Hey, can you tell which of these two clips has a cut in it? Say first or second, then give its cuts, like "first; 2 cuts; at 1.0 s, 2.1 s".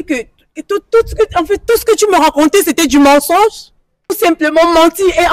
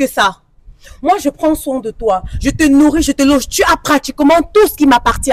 first; 1 cut; at 4.1 s